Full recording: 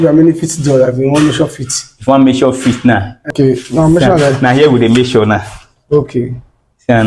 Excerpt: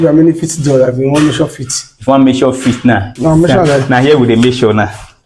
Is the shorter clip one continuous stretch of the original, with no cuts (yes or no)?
no